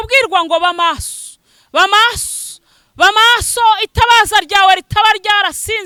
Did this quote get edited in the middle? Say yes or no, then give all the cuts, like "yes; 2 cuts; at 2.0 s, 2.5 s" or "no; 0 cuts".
no; 0 cuts